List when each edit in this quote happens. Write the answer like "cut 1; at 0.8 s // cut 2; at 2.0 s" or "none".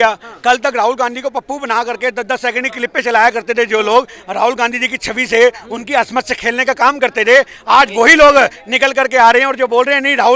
none